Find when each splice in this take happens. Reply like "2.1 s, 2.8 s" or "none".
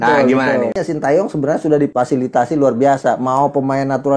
0.8 s, 1.9 s